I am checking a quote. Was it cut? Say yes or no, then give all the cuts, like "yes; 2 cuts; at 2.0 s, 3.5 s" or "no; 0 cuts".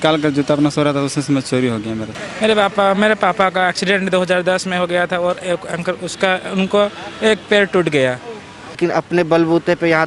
yes; 2 cuts; at 2.2 s, 8.8 s